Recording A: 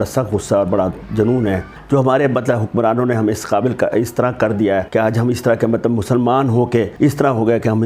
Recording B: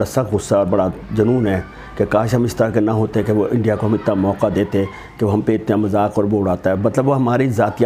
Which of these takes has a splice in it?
A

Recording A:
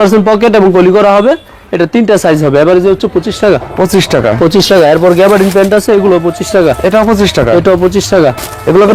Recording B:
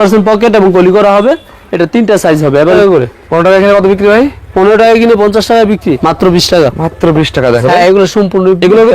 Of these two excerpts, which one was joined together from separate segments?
B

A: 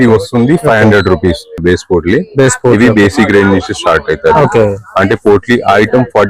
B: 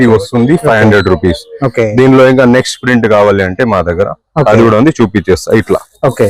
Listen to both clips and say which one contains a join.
A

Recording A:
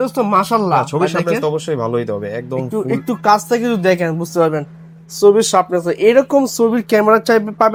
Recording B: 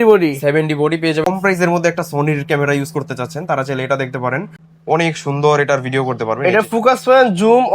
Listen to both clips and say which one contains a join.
B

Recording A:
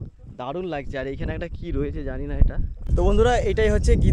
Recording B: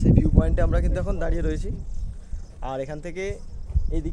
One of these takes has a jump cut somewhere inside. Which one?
A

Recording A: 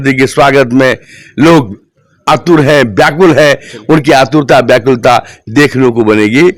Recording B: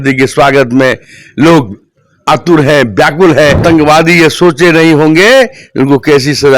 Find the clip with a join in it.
B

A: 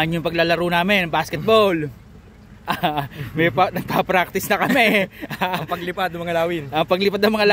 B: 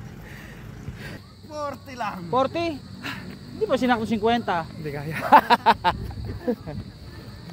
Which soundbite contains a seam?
B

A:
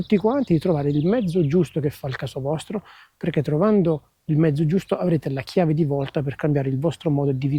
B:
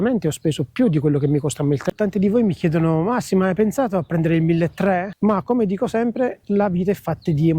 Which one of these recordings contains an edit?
B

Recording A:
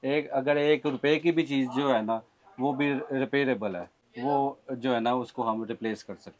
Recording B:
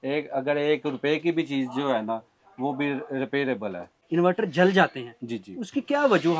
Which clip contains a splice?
B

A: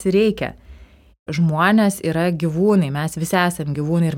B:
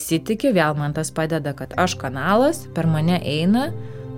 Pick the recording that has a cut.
A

